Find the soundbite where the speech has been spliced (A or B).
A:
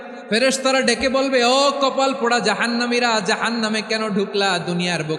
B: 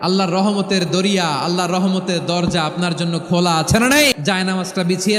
B